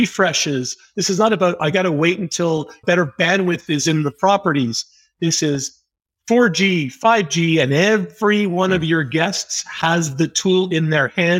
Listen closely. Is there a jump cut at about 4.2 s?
no; 1 cut; at 2.8 s

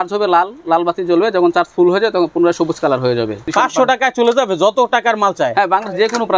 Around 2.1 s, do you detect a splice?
no; 1 cut; at 3.5 s

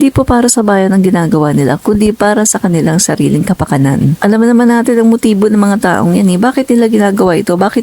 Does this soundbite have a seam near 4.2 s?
yes; 1 cut; at 4.2 s

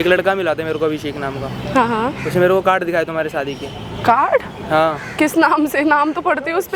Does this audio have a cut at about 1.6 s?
no; 0 cuts

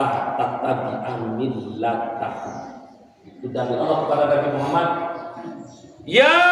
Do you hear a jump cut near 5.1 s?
no; 1 cut; at 3.8 s

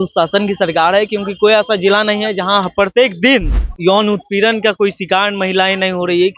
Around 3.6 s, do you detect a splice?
yes; 1 cut; at 3.6 s

